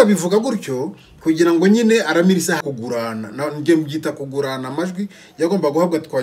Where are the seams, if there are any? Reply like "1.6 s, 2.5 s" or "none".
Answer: 2.6 s